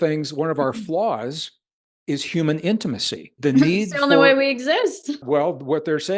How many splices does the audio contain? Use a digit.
2